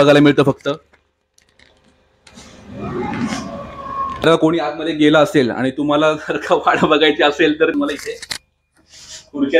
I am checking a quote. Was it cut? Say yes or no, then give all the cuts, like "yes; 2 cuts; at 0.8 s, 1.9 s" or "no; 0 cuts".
no; 0 cuts